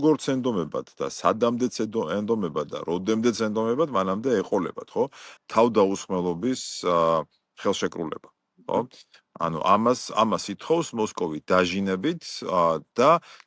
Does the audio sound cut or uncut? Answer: cut